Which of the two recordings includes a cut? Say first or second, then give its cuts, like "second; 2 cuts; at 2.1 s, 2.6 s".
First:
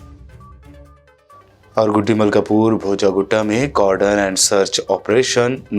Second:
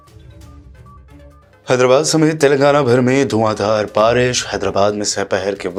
first; 1 cut; at 0.9 s